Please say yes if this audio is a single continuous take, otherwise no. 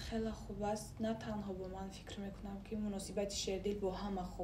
yes